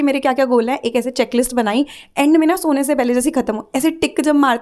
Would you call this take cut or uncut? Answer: uncut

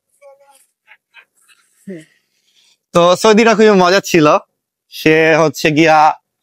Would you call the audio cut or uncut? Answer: uncut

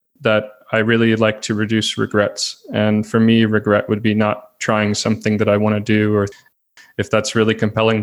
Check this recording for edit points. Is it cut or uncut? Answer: cut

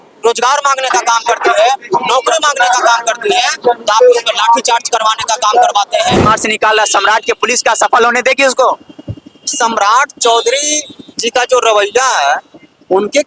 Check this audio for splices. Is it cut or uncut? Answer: cut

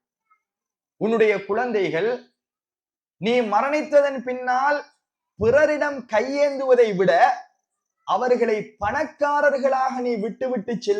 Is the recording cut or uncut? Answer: uncut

